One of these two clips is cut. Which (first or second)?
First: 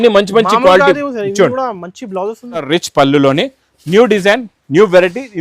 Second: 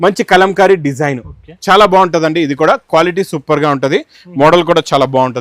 first